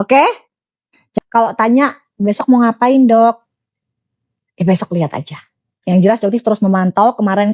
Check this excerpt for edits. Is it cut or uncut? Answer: uncut